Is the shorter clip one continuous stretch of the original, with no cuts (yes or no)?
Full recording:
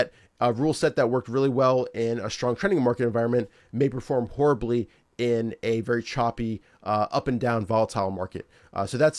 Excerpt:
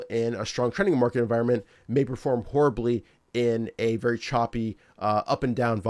yes